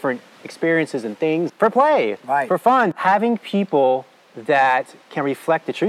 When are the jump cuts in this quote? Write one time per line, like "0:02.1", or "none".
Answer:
0:01.5
0:03.0